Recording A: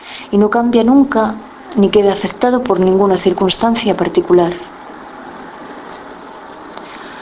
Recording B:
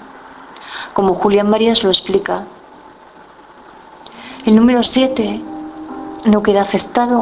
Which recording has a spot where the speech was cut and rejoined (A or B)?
A